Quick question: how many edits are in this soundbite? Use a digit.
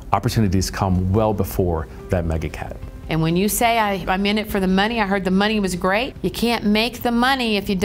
1